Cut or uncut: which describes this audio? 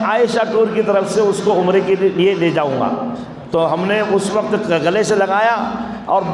uncut